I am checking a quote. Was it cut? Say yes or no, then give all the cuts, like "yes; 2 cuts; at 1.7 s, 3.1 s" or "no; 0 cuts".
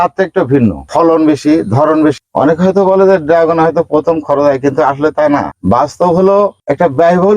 yes; 3 cuts; at 0.9 s, 2.2 s, 5.5 s